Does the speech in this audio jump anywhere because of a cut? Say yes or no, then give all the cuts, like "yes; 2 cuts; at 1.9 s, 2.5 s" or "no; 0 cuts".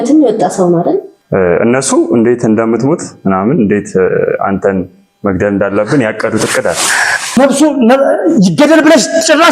yes; 2 cuts; at 1.2 s, 7.4 s